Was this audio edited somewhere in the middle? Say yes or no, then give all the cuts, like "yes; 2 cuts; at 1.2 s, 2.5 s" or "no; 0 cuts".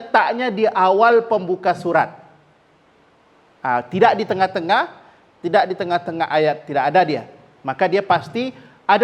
no; 0 cuts